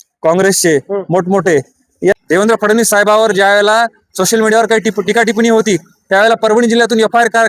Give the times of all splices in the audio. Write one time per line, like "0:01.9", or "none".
0:02.1

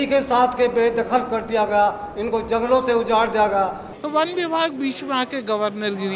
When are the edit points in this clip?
0:03.9

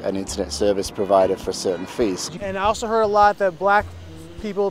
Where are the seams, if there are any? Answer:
0:02.3

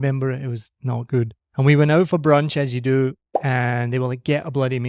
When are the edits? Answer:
0:01.4

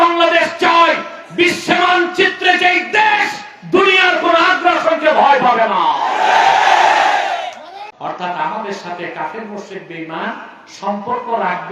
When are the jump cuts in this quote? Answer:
0:08.2

